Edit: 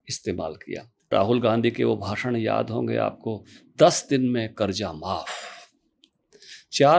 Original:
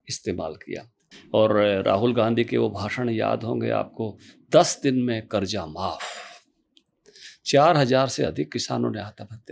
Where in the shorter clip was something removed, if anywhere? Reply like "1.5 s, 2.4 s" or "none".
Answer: 1.1 s